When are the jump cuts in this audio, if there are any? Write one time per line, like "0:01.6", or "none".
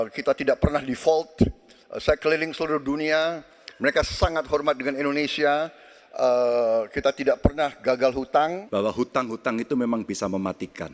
0:08.6